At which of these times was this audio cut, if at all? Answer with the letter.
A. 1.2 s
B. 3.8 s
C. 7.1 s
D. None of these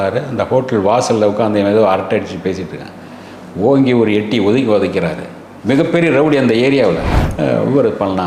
C